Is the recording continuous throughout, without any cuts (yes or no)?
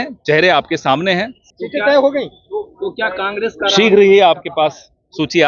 no